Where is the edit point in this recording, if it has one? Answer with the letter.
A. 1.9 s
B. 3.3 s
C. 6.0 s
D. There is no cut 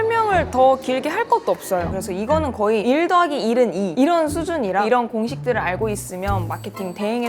A